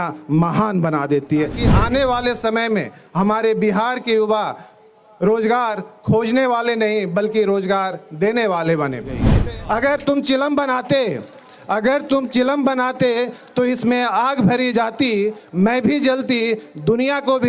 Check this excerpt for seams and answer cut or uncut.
cut